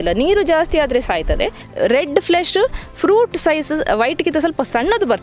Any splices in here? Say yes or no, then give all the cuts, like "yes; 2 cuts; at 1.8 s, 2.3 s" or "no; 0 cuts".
yes; 1 cut; at 1.6 s